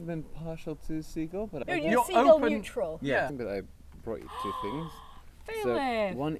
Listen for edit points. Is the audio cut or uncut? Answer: cut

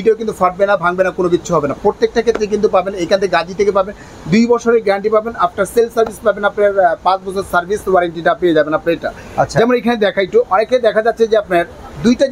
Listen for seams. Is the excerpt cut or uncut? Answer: uncut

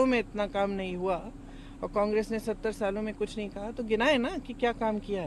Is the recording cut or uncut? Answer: cut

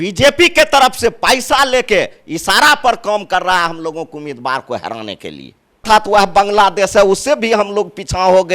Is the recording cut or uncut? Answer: cut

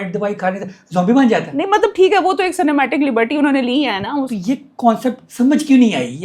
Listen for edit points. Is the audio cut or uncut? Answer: cut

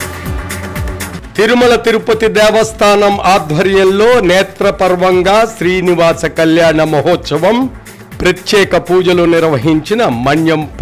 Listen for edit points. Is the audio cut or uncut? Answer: cut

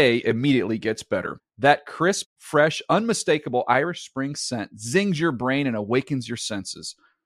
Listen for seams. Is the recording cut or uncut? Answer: uncut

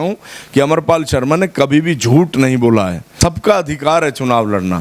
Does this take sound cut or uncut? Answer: cut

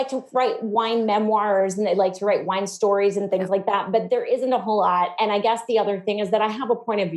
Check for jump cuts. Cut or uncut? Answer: uncut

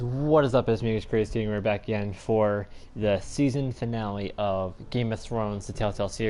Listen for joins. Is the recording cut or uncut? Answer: cut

